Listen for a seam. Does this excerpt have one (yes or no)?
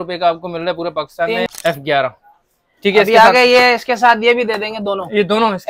yes